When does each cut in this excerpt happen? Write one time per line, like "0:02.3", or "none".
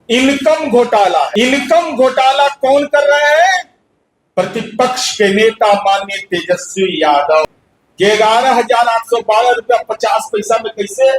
0:01.3
0:07.4